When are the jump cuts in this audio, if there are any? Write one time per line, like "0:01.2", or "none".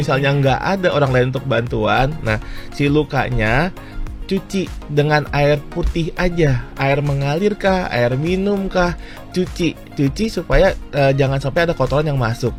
none